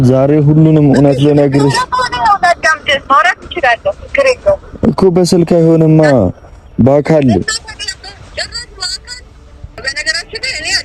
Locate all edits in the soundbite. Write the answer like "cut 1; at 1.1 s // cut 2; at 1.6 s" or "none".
cut 1; at 9.7 s

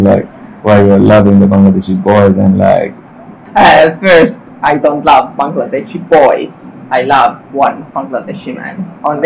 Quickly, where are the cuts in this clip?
cut 1; at 3.3 s

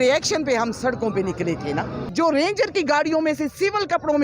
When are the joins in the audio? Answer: cut 1; at 2.0 s

